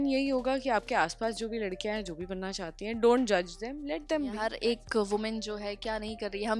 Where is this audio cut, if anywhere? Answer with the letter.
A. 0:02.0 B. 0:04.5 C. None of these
B